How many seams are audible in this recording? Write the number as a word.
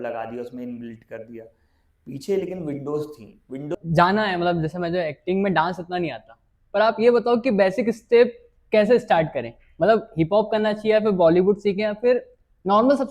one